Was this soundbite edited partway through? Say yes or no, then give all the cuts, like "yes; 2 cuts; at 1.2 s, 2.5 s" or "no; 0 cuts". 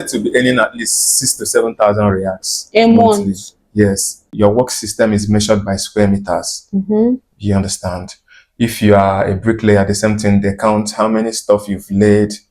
yes; 1 cut; at 4.2 s